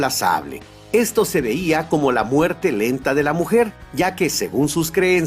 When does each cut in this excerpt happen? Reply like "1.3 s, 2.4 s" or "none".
3.3 s